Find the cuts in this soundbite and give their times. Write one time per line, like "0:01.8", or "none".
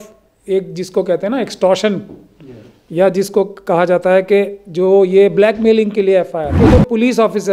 0:06.5

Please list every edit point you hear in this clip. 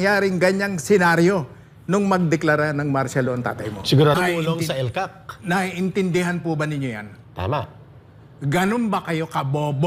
0:04.1

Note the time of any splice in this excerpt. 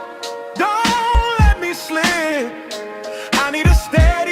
0:01.2

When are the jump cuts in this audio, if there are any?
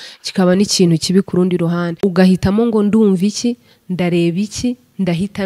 0:01.9

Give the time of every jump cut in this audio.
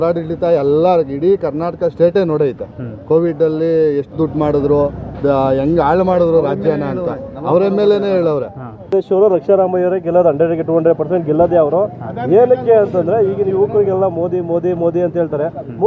0:08.9

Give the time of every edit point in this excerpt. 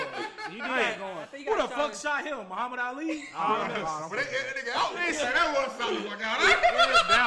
none

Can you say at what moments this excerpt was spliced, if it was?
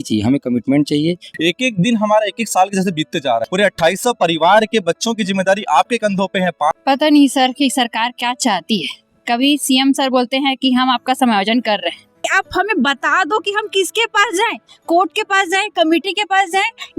0:01.3
0:03.5
0:06.7
0:12.2

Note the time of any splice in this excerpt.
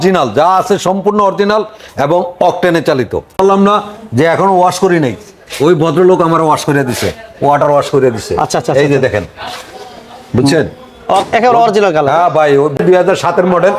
0:03.3
0:12.8

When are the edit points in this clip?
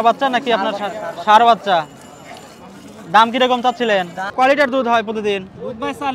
0:04.2

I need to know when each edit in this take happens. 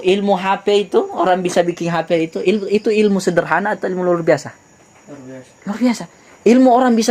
none

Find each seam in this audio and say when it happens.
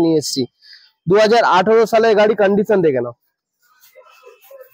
none

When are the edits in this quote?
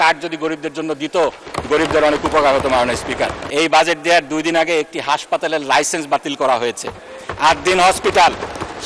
0:03.4

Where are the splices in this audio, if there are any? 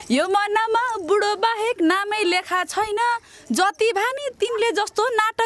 none

